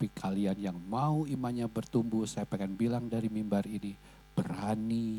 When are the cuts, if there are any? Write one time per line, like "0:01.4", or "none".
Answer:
none

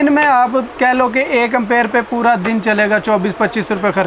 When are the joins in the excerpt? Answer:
none

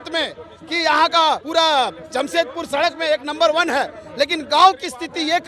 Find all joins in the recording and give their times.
0:01.4

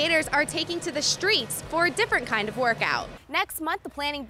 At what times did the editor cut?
0:03.2

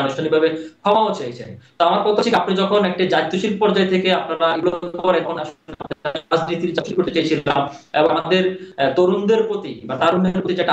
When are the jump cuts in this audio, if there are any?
none

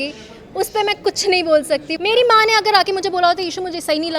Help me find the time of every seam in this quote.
0:01.9

